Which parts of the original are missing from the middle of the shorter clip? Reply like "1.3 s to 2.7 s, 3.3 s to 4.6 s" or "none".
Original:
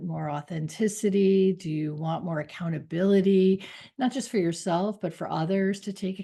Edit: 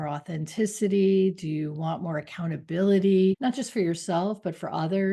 3.6 s to 4.0 s